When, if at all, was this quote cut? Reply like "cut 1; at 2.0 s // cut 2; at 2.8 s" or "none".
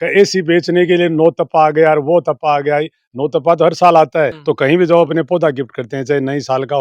cut 1; at 4.4 s